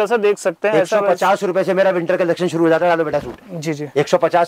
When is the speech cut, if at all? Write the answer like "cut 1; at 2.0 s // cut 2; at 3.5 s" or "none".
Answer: none